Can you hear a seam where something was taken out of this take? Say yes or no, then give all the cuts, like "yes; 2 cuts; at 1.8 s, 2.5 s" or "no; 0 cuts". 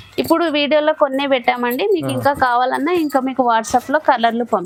no; 0 cuts